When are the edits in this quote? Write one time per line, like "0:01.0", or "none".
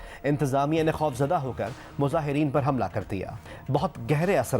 0:03.5

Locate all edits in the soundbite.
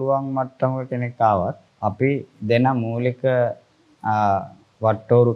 0:01.7

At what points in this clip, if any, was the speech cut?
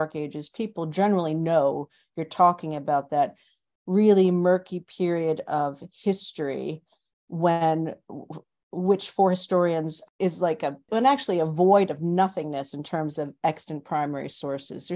none

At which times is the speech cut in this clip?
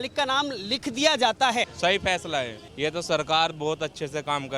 0:01.7
0:02.6

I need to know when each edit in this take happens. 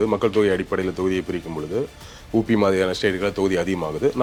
none

